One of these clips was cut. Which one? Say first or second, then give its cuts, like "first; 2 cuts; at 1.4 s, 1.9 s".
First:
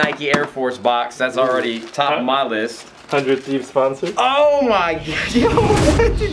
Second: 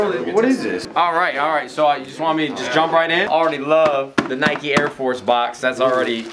second; 2 cuts; at 0.8 s, 3.3 s